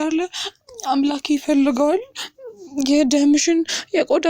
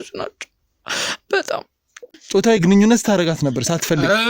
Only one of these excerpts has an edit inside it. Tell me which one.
second; 1 cut; at 2.1 s

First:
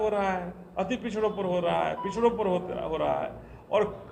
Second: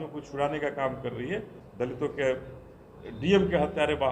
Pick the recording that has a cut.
second; 1 cut; at 1.5 s

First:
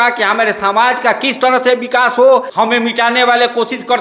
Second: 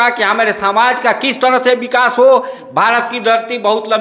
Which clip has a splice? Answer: first; 1 cut; at 2.5 s

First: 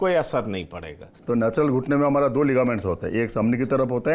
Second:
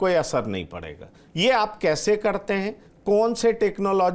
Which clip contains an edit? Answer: first; 1 cut; at 1.2 s

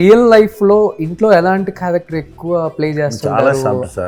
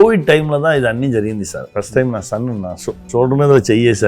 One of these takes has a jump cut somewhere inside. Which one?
second; 2 cuts; at 1.6 s, 3.0 s

